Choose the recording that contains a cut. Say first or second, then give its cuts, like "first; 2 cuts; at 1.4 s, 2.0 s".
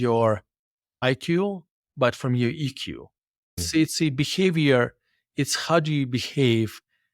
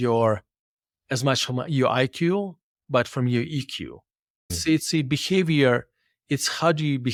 first; 1 cut; at 1.0 s